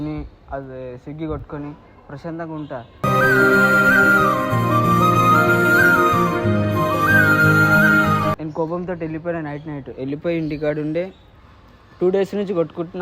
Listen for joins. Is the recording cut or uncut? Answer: cut